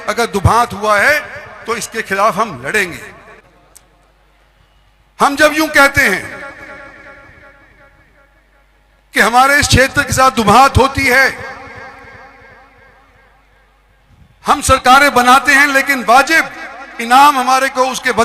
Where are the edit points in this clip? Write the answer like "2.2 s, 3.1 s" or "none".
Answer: 3.4 s